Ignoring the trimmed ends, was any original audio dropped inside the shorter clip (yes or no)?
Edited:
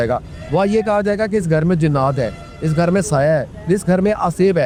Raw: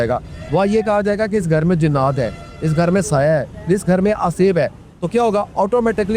no